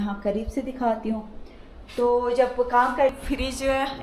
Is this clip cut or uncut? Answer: cut